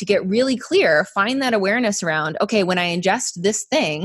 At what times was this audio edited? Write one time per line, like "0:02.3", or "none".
none